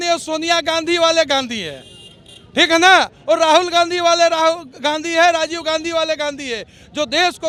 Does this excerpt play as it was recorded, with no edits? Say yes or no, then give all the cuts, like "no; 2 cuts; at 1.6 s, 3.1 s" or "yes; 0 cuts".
yes; 0 cuts